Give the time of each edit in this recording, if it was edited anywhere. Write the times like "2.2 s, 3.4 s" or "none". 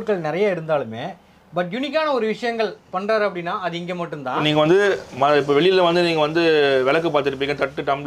4.4 s